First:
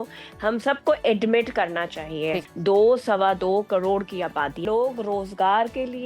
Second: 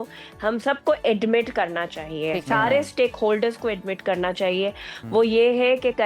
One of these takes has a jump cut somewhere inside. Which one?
first; 2 cuts; at 2.4 s, 4.6 s

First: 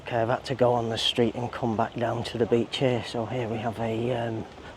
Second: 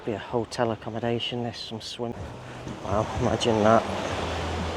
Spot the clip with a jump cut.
second; 1 cut; at 2.1 s

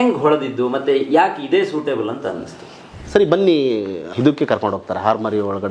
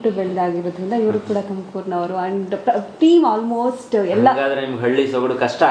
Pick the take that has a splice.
first; 2 cuts; at 2.9 s, 4.1 s

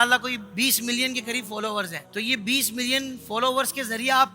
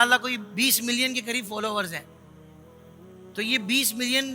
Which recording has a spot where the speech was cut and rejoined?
first; 1 cut; at 2.0 s

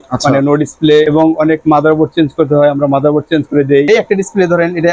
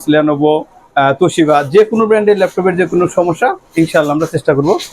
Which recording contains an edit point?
first; 2 cuts; at 1.1 s, 3.9 s

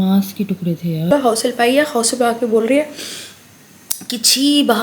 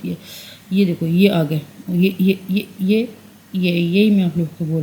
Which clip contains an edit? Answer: first; 1 cut; at 1.1 s

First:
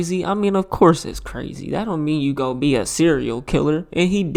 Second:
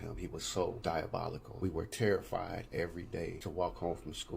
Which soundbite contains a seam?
second; 2 cuts; at 1.1 s, 3.4 s

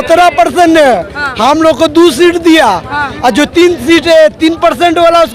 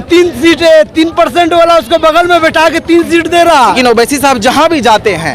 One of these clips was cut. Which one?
second; 1 cut; at 3.8 s

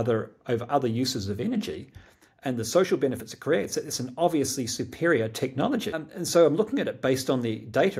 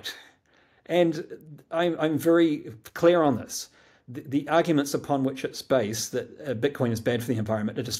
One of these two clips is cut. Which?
first; 1 cut; at 6.0 s

